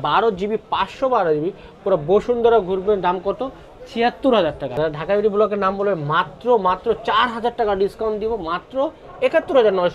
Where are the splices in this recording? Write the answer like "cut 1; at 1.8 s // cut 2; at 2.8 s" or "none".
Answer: none